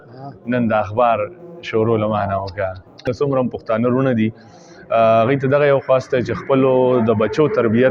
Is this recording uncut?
yes; 0 cuts

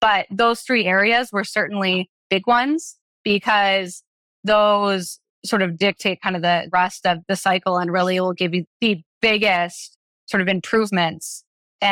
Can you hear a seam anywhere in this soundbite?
yes; 1 cut; at 8.6 s

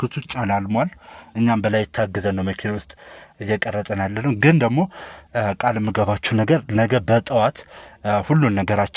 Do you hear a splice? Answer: no; 0 cuts

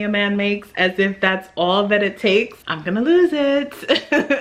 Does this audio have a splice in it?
no; 0 cuts

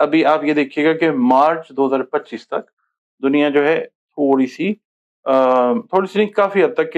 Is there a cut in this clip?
no; 0 cuts

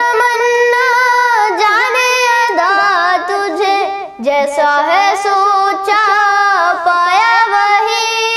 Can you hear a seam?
no; 0 cuts

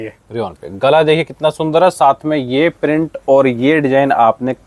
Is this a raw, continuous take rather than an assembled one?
yes; 0 cuts

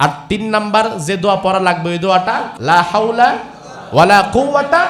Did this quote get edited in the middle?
yes; 1 cut; at 2.5 s

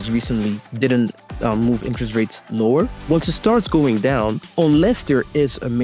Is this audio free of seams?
no; 1 cut; at 3.0 s

